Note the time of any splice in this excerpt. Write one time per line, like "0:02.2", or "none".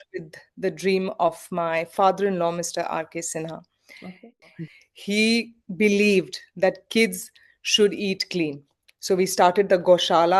0:04.4